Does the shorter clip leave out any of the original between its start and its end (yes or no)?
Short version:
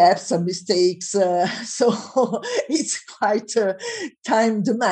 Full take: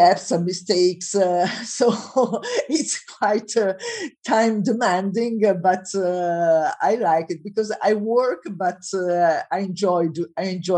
no